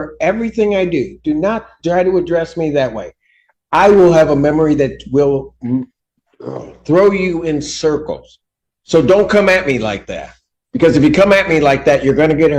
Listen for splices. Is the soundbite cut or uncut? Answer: uncut